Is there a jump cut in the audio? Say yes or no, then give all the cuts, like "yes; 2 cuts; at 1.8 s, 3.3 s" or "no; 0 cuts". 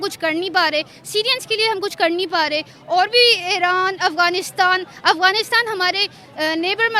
no; 0 cuts